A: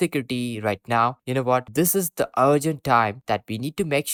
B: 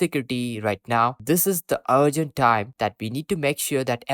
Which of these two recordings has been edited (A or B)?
B